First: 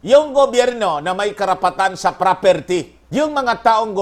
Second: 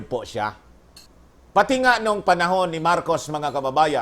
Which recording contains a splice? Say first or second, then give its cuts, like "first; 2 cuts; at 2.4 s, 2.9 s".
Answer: second; 1 cut; at 1.1 s